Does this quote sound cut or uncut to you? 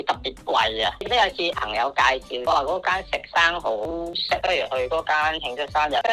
cut